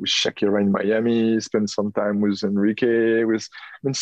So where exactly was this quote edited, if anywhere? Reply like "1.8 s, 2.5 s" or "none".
none